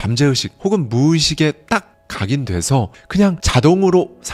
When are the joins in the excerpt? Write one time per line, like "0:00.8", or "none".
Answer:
none

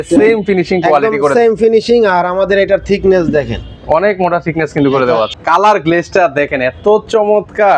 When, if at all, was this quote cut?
0:05.3

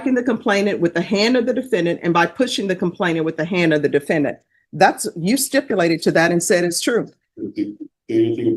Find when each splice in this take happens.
none

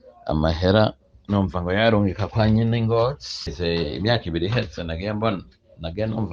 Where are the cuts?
0:03.5

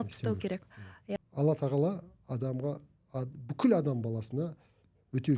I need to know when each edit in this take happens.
0:01.1

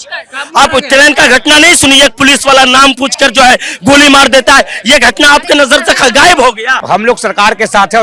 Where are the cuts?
0:06.8

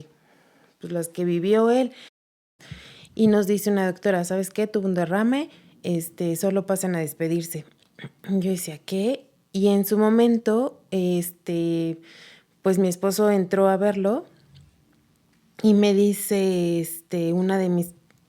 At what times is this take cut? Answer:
0:02.4

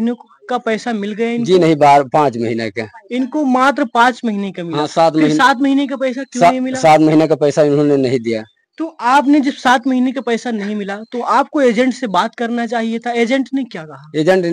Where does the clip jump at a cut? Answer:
none

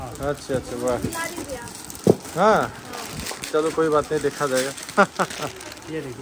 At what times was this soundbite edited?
none

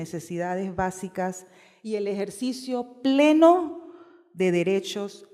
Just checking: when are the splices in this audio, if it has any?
0:04.1

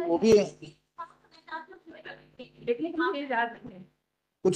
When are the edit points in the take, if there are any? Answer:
none

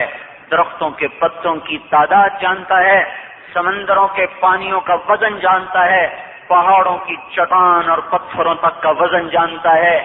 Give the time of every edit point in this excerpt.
0:07.2

